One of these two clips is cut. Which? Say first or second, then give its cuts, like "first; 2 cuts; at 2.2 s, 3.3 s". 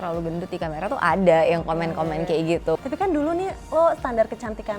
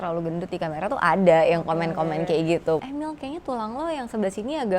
second; 1 cut; at 2.8 s